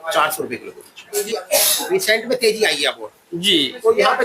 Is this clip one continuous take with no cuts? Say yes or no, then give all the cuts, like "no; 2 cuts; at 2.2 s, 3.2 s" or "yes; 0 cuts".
no; 1 cut; at 1.2 s